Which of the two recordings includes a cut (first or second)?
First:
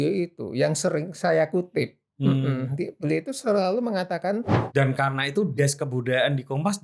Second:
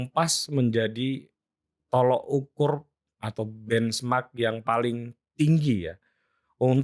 first